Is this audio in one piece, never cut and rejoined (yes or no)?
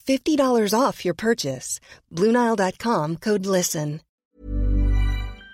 no